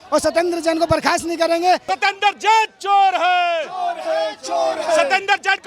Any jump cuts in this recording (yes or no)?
yes